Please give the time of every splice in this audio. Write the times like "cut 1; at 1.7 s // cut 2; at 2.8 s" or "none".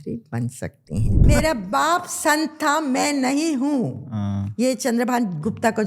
cut 1; at 1.2 s